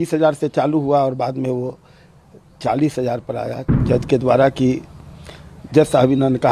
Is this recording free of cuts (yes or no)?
no